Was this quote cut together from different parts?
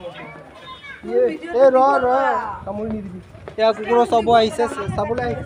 no; 0 cuts

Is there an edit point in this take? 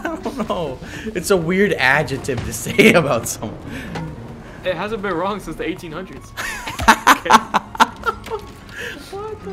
no; 0 cuts

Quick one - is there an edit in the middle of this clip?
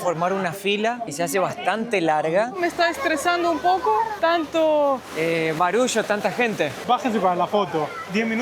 yes; 5 cuts; at 1.1 s, 2.6 s, 4.1 s, 5.1 s, 6.8 s

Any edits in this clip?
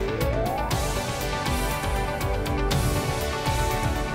no; 0 cuts

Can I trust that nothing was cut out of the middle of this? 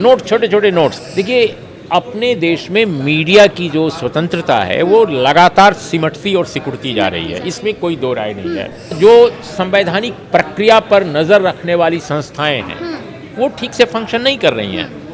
no; 2 cuts; at 1.0 s, 8.9 s

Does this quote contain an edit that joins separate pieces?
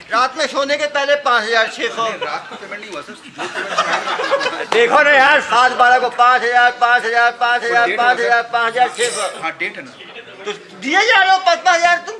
no; 0 cuts

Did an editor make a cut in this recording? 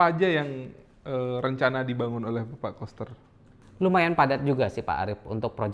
no; 0 cuts

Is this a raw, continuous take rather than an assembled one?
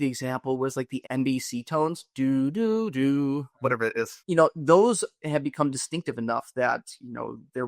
no; 2 cuts; at 1.0 s, 4.2 s

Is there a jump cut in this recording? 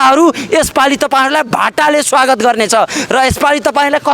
no; 0 cuts

